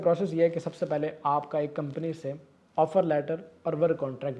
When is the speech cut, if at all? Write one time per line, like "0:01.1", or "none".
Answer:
none